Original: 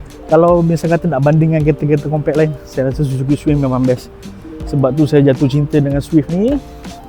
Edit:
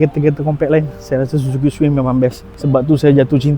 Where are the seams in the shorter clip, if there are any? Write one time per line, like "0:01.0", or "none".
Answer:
0:02.5